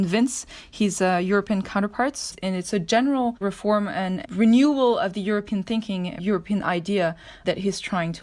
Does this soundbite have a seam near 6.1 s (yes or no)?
yes